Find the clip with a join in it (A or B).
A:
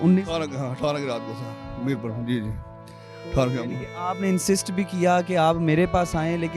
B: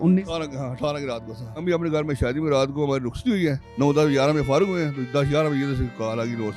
B